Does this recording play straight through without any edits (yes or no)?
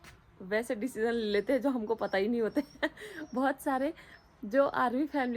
yes